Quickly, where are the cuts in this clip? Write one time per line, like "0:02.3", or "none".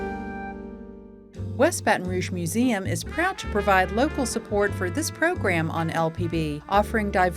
0:01.2

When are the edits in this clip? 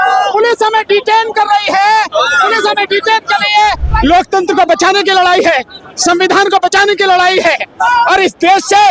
0:03.9

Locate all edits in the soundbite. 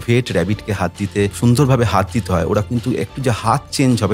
0:01.3

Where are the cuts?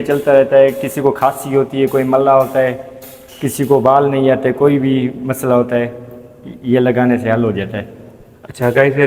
none

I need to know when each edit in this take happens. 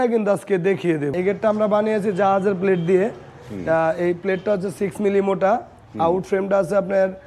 0:01.1

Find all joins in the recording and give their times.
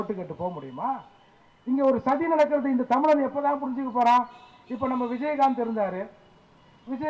none

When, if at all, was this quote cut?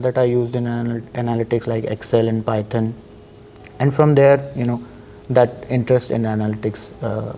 none

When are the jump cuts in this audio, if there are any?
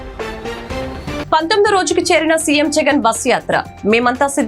0:01.2

